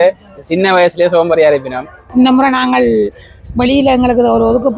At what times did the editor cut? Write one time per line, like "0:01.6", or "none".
0:01.9

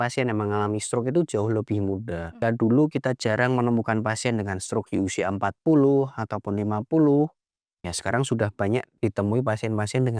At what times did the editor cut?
0:02.4
0:09.0

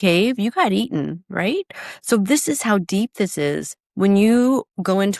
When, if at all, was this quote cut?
none

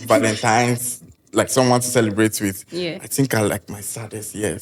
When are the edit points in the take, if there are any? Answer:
none

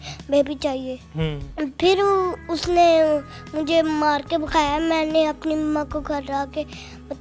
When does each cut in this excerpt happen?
none

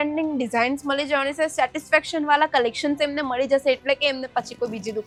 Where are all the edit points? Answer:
none

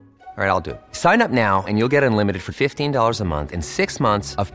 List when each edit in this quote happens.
none

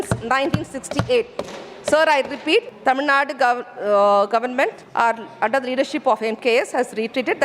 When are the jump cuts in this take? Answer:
0:02.7
0:04.8

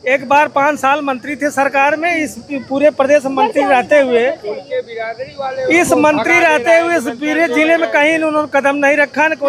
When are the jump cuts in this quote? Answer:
none

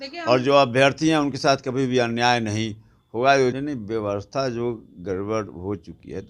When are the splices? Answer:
0:03.6

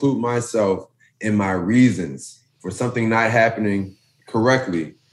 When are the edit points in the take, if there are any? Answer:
none

